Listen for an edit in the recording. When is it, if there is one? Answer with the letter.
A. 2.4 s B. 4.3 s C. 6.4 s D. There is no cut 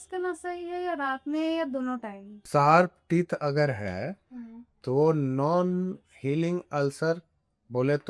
A